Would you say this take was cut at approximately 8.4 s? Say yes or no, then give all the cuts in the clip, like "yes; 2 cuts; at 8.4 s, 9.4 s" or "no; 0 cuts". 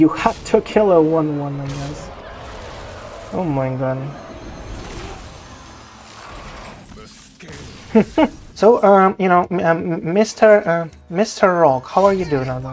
yes; 1 cut; at 8.4 s